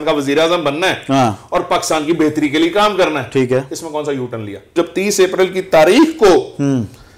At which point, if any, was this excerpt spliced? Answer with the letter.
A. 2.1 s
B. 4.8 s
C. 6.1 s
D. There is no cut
B